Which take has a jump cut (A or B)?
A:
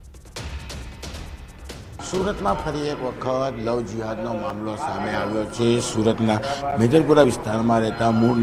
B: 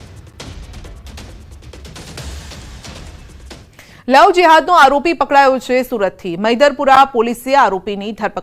B